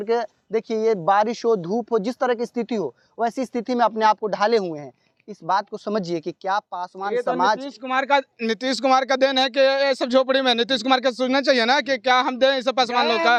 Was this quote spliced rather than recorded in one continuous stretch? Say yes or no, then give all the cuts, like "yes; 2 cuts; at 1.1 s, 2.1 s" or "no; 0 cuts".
no; 0 cuts